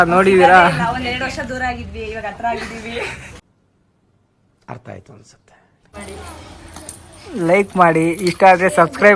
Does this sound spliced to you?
yes; 2 cuts; at 3.5 s, 6.0 s

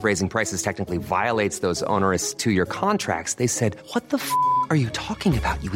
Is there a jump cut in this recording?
no; 0 cuts

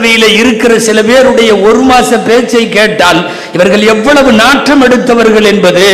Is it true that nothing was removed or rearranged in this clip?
yes; 0 cuts

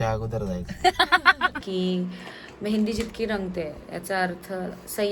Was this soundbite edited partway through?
yes; 1 cut; at 1.6 s

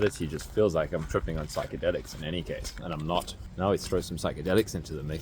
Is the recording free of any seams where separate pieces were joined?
no; 1 cut; at 3.4 s

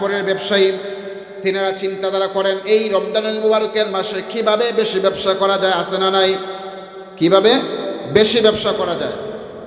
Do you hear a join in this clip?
no; 0 cuts

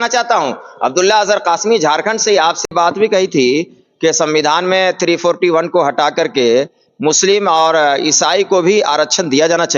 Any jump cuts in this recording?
yes; 1 cut; at 2.7 s

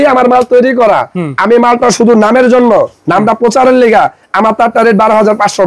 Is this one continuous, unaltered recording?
yes; 0 cuts

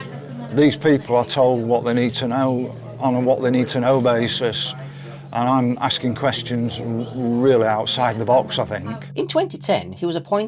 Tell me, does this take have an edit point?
yes; 1 cut; at 9.0 s

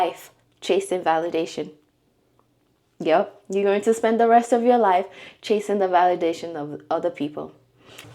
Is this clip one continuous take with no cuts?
yes; 0 cuts

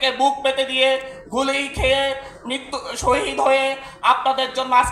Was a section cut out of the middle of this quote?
no; 0 cuts

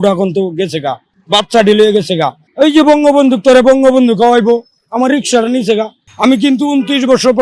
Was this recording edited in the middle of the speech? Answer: yes; 3 cuts; at 1.1 s, 2.4 s, 6.0 s

